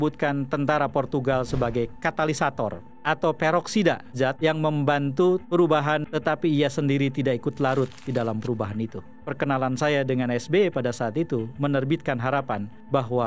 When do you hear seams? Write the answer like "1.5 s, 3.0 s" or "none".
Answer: 4.1 s, 6.0 s, 9.2 s